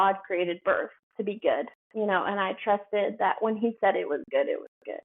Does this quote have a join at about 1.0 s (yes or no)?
yes